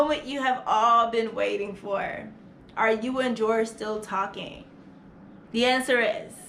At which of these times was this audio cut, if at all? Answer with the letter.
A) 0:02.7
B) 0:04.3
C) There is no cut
C